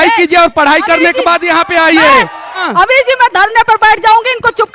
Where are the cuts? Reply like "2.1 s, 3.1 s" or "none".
2.4 s